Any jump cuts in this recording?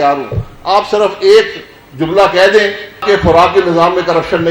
yes; 1 cut; at 3.0 s

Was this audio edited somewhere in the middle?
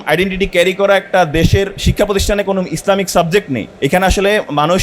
yes; 2 cuts; at 1.8 s, 3.7 s

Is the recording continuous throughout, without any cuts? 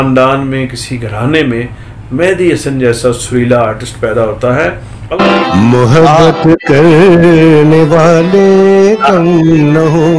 no; 1 cut; at 5.1 s

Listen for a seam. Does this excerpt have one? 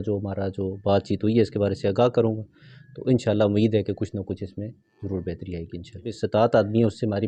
yes; 1 cut; at 6.1 s

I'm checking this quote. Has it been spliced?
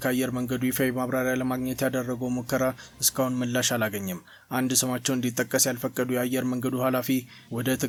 no; 0 cuts

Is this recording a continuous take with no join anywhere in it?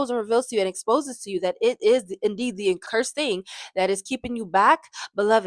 no; 1 cut; at 2.8 s

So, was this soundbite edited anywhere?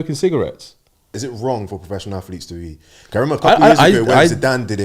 yes; 1 cut; at 1.1 s

